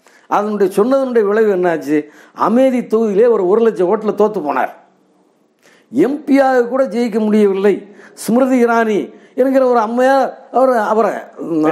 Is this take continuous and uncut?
yes; 0 cuts

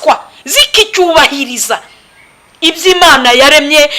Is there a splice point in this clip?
no; 0 cuts

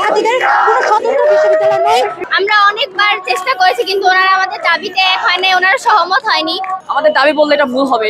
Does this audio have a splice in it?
yes; 2 cuts; at 2.2 s, 6.8 s

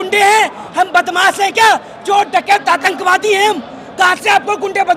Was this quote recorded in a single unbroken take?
yes; 0 cuts

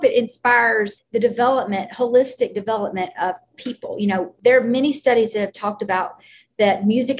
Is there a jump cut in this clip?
yes; 2 cuts; at 1.0 s, 4.3 s

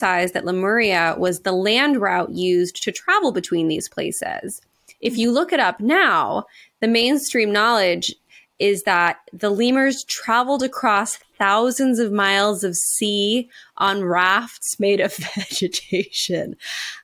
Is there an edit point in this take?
no; 0 cuts

